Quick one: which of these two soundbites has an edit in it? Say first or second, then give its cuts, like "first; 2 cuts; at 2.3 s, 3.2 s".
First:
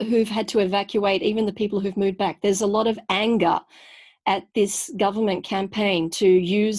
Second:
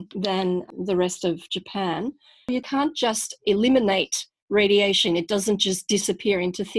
second; 1 cut; at 2.7 s